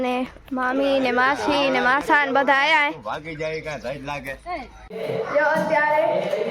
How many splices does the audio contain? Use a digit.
1